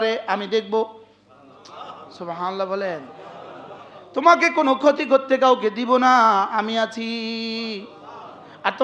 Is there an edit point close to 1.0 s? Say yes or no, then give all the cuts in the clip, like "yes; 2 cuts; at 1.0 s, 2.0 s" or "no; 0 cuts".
no; 0 cuts